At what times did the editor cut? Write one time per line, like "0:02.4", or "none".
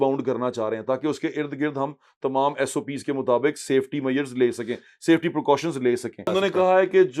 0:06.3